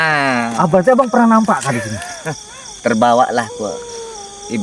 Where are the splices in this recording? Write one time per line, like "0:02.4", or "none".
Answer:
none